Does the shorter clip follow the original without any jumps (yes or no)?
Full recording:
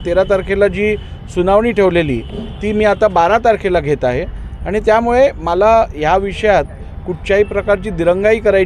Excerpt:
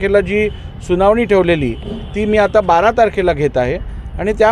yes